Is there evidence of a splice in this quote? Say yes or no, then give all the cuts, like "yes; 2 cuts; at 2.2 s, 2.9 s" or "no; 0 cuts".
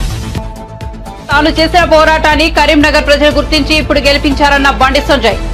yes; 1 cut; at 1.2 s